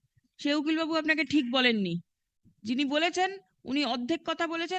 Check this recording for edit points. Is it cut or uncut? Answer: uncut